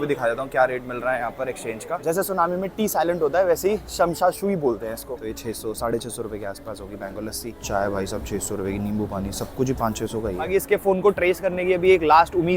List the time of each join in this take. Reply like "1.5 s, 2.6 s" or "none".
2.0 s, 5.0 s, 7.6 s, 10.5 s